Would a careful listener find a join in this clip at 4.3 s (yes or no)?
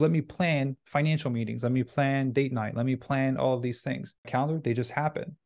yes